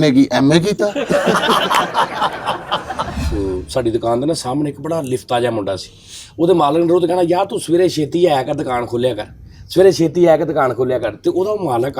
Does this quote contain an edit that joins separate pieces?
yes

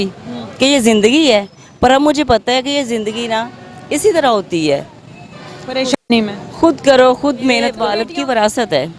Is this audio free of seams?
no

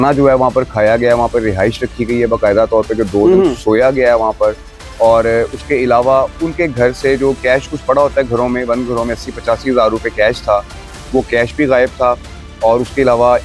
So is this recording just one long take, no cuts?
yes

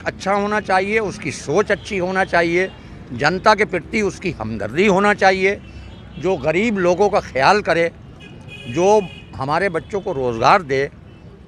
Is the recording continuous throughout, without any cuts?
yes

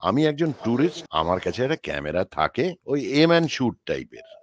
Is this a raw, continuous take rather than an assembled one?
no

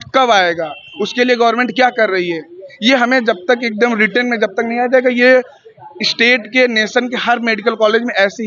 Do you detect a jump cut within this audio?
no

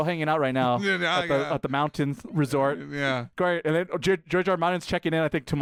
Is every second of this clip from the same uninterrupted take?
yes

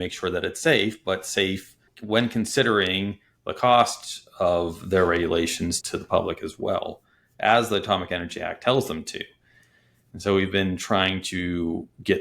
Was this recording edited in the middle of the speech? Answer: yes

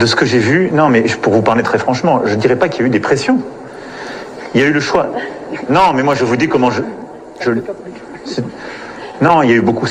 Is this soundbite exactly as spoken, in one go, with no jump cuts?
yes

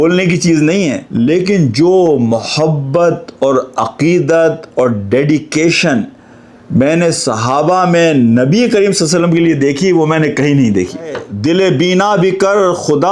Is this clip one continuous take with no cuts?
no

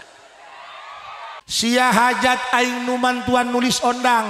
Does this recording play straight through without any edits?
no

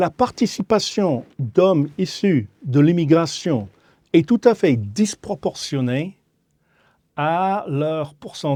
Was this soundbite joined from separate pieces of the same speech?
no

